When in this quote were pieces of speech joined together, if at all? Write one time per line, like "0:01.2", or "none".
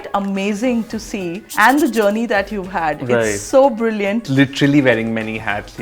0:04.3